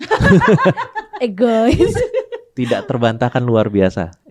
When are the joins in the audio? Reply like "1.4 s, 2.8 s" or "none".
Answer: none